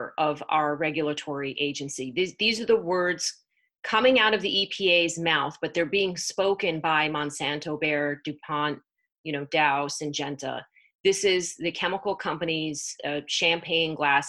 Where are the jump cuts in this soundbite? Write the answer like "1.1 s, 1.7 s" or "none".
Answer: none